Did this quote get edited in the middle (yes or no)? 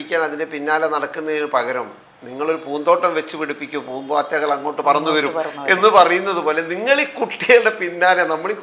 no